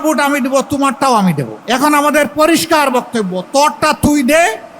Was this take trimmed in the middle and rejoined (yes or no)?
yes